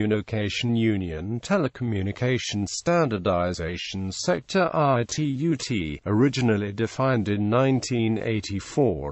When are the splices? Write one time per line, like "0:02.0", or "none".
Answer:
none